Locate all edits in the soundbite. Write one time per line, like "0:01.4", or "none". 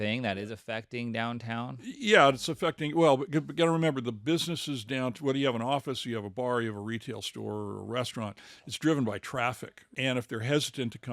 0:01.8
0:09.9